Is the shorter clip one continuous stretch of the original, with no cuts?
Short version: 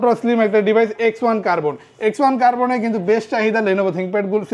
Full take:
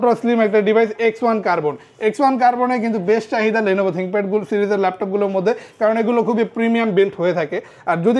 yes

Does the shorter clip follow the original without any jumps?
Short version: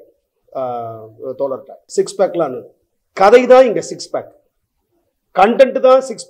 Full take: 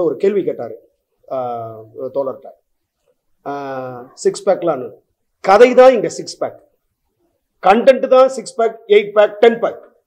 no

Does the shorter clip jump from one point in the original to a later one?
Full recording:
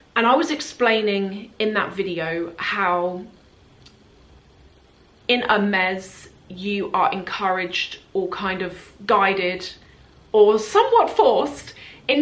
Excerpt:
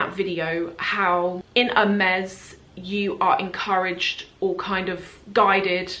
yes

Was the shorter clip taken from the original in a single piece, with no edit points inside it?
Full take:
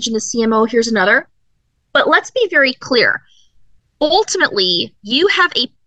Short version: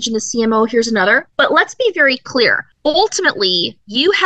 no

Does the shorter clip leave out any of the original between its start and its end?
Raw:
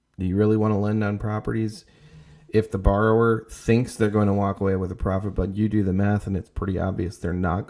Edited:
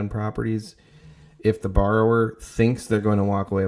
no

